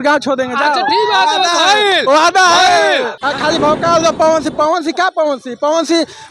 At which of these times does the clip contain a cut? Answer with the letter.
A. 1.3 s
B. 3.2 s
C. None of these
B